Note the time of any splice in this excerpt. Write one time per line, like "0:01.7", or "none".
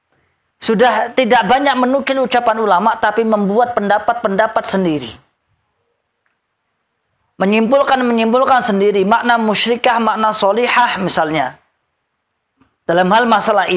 none

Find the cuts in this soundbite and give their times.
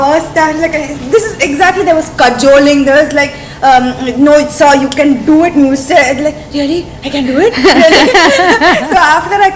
none

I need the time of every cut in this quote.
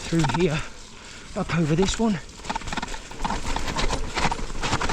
0:03.0

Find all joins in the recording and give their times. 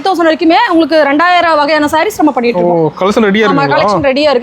none

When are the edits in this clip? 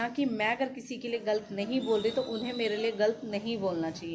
none

